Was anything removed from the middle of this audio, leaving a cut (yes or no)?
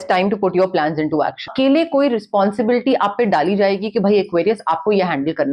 yes